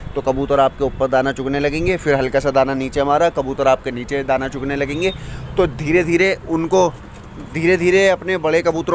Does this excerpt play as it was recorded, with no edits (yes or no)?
yes